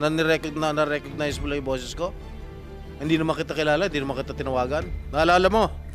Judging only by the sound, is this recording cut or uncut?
cut